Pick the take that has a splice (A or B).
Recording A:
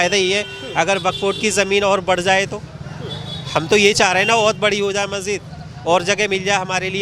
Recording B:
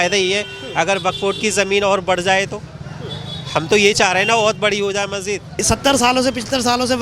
B